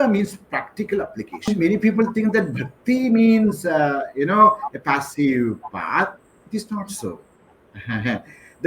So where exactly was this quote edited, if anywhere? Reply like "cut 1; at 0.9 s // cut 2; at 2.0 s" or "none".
cut 1; at 1.5 s